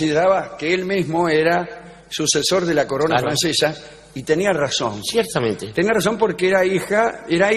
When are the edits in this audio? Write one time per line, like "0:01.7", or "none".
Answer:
0:04.4